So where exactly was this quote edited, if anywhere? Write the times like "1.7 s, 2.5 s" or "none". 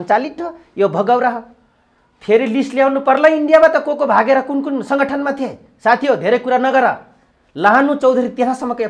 none